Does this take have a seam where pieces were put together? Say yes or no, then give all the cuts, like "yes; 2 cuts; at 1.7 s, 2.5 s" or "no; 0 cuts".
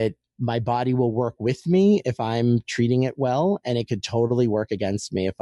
no; 0 cuts